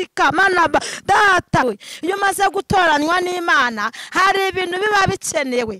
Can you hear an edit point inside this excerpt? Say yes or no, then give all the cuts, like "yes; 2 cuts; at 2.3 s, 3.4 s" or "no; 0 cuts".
yes; 1 cut; at 1.6 s